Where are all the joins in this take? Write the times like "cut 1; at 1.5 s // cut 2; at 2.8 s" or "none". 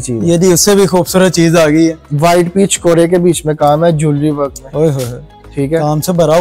none